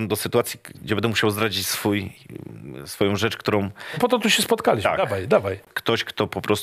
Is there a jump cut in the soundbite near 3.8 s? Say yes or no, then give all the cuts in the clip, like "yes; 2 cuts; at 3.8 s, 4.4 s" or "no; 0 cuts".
no; 1 cut; at 5.7 s